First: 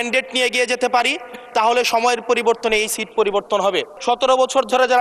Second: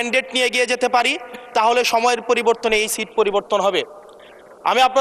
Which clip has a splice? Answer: first; 1 cut; at 3.9 s

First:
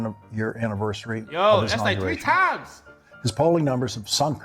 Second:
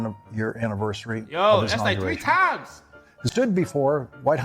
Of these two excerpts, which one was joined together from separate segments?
second; 1 cut; at 3.3 s

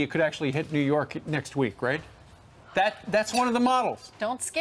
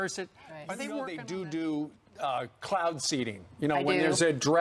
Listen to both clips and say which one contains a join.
second; 1 cut; at 1.1 s

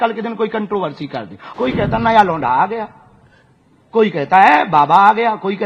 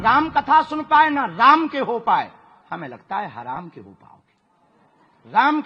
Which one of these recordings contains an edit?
first; 1 cut; at 1.4 s

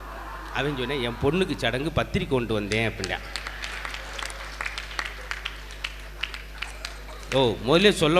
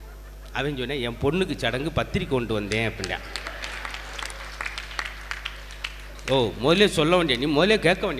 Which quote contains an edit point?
second; 1 cut; at 6.2 s

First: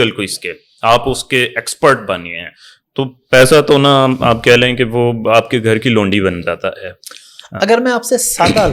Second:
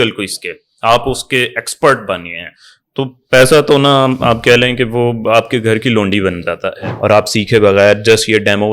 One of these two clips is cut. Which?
second; 1 cut; at 6.9 s

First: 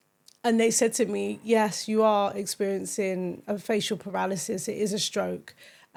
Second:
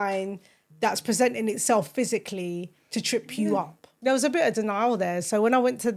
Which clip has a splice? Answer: second; 1 cut; at 3.9 s

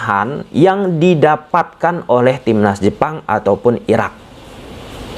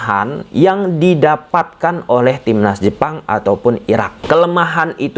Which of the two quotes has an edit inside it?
second; 1 cut; at 4.2 s

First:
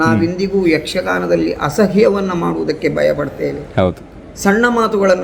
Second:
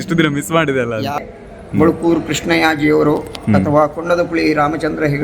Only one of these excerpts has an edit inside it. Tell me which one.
second; 1 cut; at 1.2 s

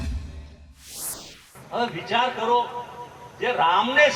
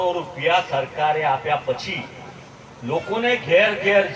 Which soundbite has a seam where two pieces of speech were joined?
first; 1 cut; at 1.4 s

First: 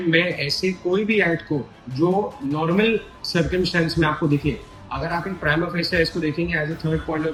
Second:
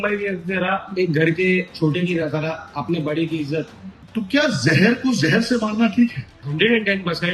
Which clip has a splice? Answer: second; 2 cuts; at 4.0 s, 6.3 s

